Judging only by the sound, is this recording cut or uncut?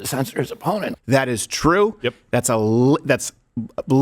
cut